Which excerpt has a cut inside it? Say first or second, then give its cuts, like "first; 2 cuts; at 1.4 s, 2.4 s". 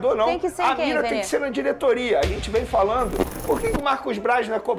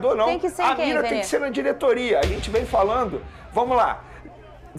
first; 1 cut; at 3.3 s